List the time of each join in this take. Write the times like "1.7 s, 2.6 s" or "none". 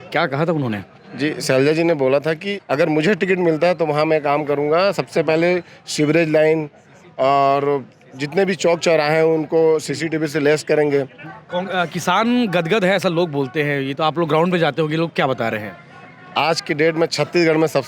2.6 s, 11.2 s